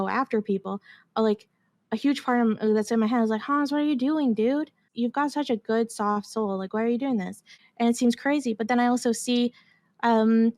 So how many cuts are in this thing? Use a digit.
2